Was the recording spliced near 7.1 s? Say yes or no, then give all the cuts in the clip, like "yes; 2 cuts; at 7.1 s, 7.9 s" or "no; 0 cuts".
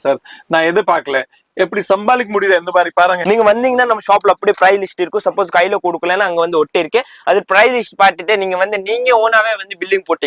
no; 1 cut; at 3.2 s